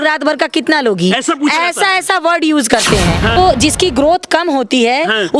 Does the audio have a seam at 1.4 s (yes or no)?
no